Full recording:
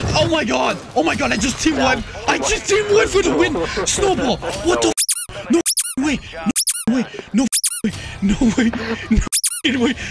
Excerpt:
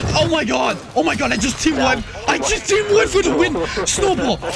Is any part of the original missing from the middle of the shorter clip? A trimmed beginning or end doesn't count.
no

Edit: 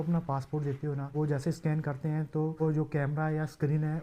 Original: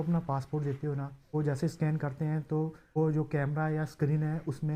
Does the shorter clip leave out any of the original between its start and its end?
yes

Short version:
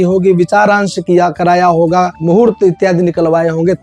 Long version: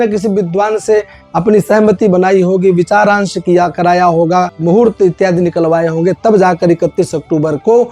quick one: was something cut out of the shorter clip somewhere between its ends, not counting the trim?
no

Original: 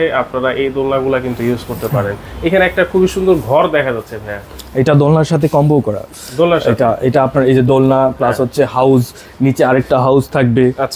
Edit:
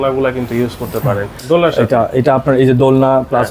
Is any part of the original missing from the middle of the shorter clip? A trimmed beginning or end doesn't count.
yes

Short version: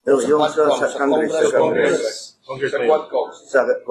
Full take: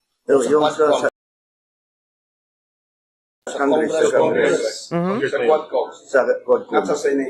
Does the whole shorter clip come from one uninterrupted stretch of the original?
no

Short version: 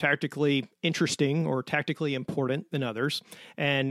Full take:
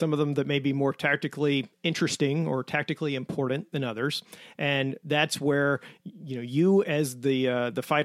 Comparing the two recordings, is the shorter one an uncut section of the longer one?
yes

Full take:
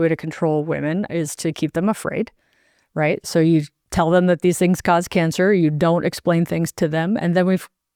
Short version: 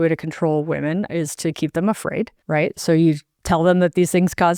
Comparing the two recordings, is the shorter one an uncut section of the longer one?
no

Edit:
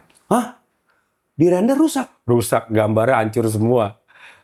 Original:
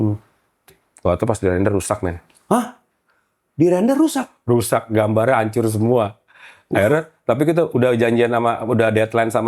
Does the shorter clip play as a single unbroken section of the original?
yes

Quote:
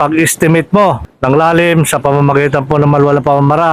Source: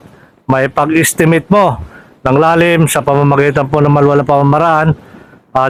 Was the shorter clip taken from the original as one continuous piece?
no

